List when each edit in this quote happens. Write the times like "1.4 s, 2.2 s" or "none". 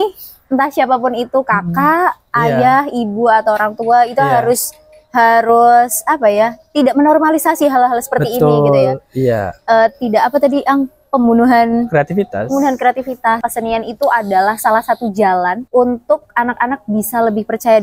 13.5 s